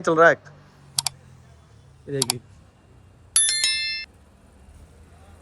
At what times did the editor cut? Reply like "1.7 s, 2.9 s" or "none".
none